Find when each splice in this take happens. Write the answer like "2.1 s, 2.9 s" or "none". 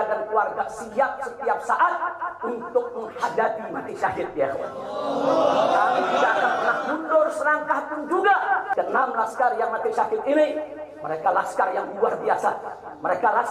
8.7 s